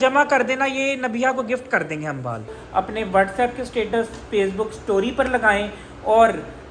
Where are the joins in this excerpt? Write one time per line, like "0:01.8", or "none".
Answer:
0:02.6